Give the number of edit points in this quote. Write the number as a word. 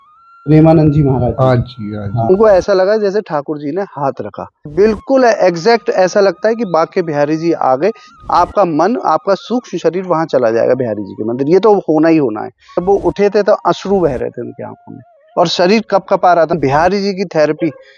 five